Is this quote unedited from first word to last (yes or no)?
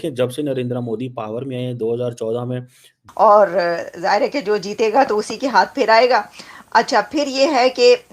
no